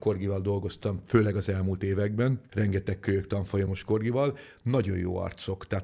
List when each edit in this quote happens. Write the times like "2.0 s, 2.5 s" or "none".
2.4 s